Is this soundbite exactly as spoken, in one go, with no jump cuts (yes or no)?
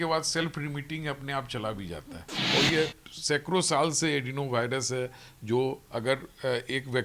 no